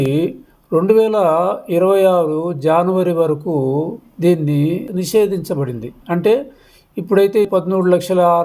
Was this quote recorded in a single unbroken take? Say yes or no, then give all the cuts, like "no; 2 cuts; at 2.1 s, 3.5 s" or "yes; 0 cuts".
no; 1 cut; at 7.5 s